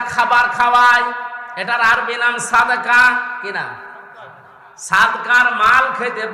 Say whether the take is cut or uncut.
uncut